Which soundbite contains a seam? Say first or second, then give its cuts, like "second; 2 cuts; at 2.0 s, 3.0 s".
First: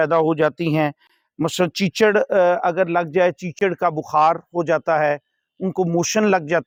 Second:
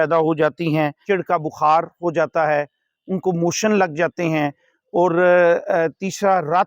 second; 1 cut; at 1.0 s